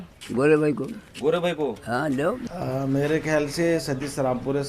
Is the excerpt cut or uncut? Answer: cut